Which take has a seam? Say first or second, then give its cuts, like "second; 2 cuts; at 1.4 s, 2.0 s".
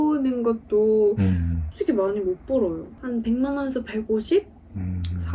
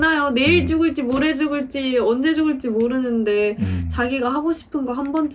first; 2 cuts; at 1.7 s, 2.9 s